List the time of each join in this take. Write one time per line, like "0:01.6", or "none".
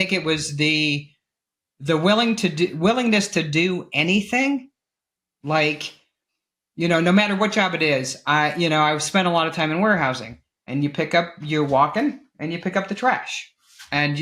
none